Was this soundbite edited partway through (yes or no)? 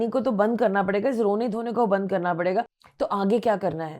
yes